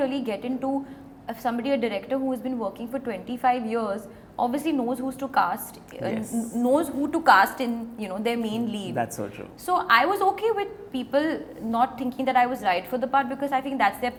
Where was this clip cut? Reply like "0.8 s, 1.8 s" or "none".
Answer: none